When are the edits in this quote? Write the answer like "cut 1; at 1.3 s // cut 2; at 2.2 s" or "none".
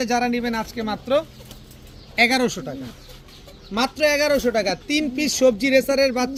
none